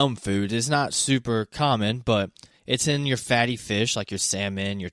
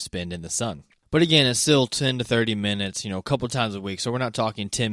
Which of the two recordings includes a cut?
second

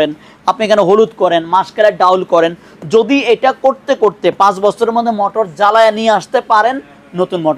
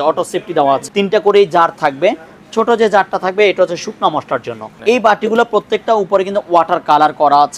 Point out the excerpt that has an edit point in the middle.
second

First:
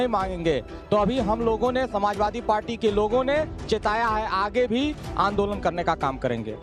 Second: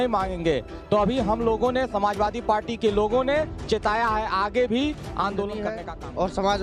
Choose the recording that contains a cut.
second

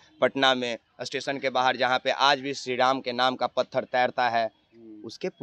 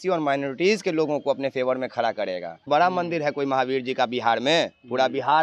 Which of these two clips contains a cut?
second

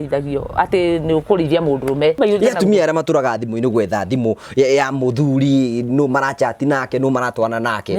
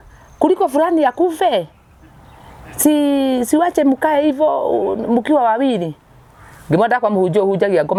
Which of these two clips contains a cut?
first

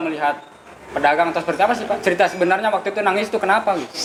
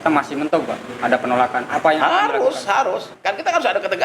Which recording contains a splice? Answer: second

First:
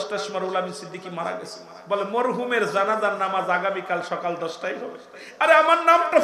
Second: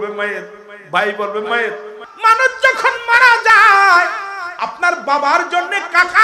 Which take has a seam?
second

